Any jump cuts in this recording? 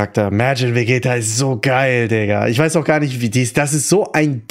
no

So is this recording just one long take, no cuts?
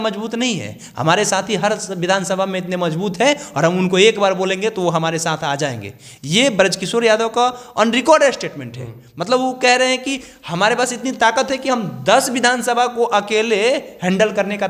yes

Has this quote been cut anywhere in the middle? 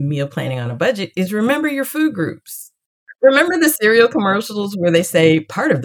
yes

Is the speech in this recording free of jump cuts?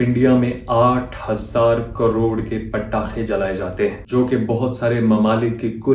yes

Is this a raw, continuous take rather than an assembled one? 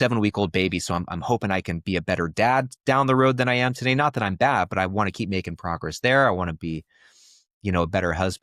yes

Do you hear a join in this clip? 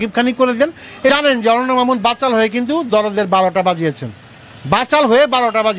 yes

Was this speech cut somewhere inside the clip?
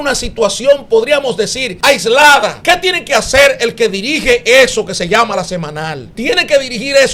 yes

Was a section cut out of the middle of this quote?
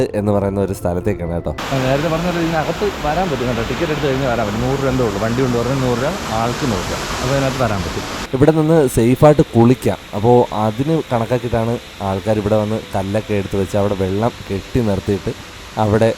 yes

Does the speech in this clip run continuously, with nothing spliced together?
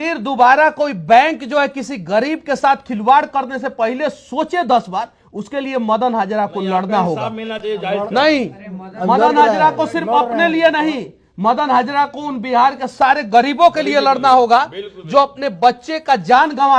yes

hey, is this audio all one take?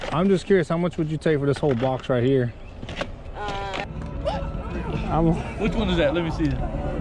no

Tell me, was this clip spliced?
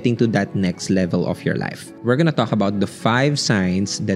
yes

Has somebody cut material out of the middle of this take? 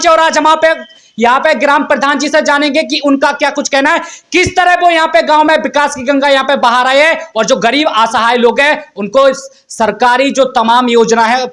no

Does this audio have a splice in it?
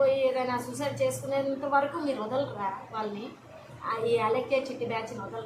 no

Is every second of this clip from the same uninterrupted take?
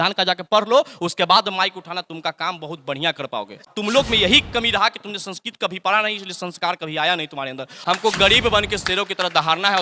no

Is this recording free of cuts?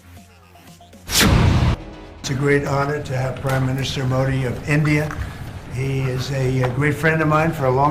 no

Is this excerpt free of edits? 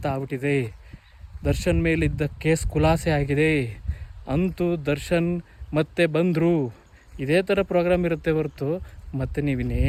yes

